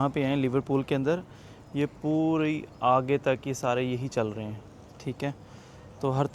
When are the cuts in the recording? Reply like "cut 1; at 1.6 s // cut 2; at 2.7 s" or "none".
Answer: none